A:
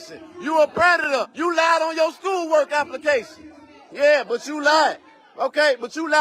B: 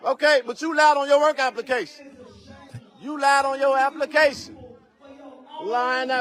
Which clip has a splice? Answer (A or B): A